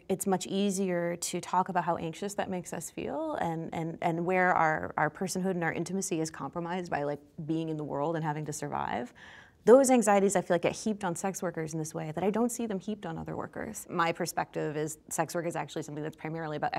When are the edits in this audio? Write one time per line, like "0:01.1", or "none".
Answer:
0:13.8